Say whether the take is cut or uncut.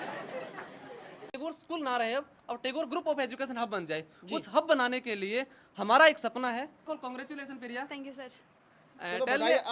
cut